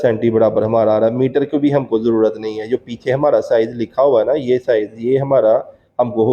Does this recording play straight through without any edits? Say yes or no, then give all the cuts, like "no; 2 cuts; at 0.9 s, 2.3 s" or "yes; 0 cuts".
yes; 0 cuts